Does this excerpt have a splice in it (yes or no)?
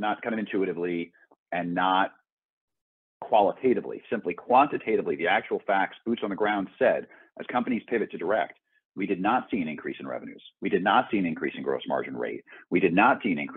no